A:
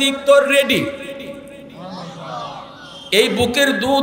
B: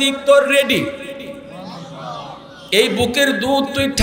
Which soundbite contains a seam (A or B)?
B